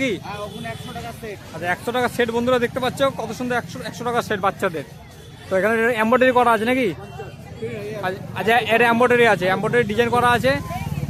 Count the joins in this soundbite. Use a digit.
0